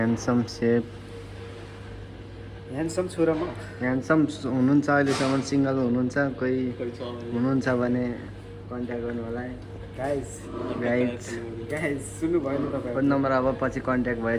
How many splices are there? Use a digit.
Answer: 0